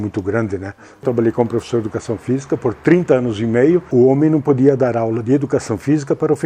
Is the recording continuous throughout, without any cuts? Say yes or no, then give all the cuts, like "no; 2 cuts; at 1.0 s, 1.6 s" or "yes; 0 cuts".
no; 2 cuts; at 1.0 s, 3.9 s